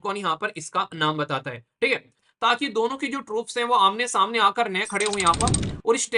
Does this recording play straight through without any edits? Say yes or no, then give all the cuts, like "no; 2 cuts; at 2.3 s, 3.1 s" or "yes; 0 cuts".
no; 1 cut; at 2.2 s